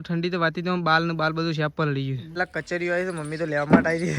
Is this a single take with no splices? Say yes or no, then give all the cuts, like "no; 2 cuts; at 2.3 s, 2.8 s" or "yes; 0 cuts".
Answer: no; 1 cut; at 2.4 s